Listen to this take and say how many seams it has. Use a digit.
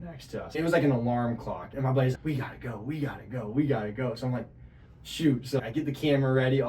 1